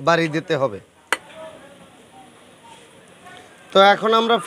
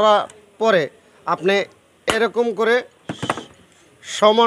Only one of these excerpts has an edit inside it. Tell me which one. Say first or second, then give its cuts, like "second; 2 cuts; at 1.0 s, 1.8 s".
first; 1 cut; at 1.3 s